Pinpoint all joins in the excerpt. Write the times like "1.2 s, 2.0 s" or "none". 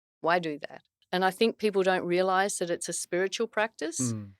1.0 s